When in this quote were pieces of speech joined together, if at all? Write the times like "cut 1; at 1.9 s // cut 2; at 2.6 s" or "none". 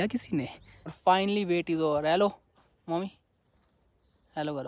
cut 1; at 1.0 s